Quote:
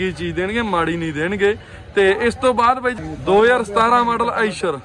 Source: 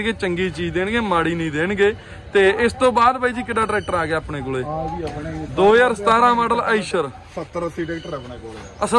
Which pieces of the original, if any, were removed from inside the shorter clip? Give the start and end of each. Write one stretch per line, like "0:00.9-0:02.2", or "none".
0:03.4-0:05.3